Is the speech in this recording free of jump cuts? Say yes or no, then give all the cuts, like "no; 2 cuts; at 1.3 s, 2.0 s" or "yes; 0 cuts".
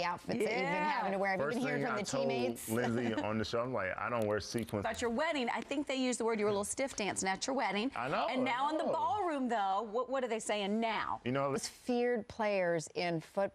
no; 1 cut; at 3.1 s